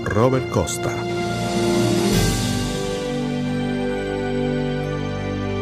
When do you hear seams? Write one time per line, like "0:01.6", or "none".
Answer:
none